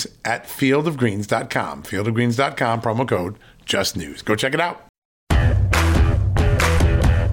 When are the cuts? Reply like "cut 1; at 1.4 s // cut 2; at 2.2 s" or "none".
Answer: cut 1; at 5.2 s

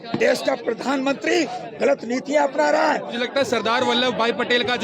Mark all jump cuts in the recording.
cut 1; at 3.2 s

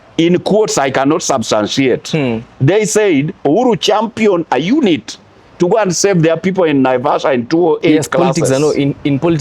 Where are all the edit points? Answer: cut 1; at 8.5 s

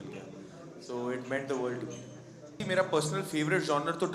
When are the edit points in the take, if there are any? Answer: none

